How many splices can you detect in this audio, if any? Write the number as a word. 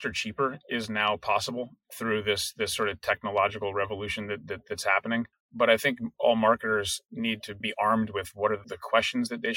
three